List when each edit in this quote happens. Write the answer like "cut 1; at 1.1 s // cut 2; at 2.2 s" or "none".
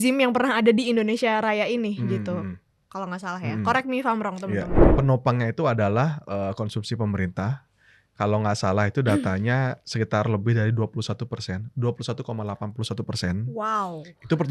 cut 1; at 4.8 s